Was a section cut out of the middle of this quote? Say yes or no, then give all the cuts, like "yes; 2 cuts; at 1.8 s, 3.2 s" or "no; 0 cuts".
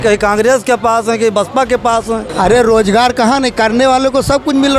yes; 1 cut; at 2.3 s